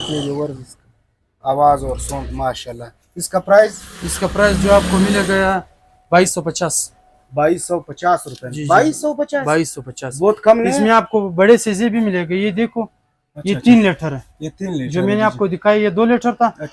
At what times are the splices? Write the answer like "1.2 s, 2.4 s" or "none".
none